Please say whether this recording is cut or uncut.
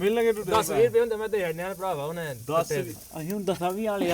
uncut